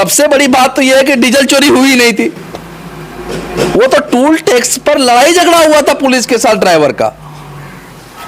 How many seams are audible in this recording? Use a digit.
0